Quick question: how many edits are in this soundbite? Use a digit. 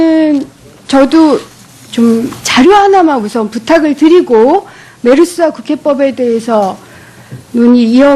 1